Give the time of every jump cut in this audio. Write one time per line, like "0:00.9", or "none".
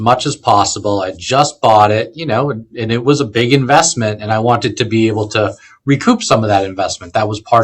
none